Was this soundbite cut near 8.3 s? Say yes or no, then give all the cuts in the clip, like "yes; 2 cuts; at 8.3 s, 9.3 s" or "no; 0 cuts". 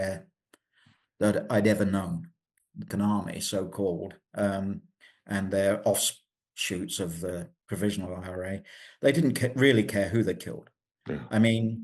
no; 1 cut; at 2.9 s